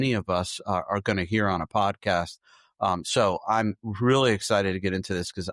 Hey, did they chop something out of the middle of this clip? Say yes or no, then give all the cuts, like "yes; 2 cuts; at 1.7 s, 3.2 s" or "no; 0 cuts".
no; 0 cuts